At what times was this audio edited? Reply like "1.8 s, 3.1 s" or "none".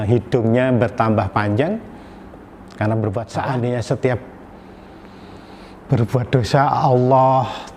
3.3 s